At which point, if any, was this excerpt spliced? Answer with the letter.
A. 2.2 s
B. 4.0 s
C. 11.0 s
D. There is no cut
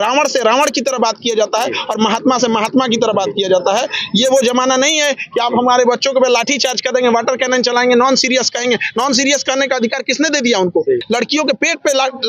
C